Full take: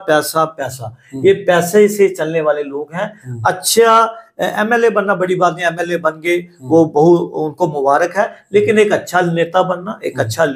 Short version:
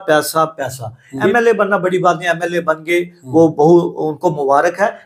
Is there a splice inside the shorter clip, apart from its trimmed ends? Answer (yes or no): yes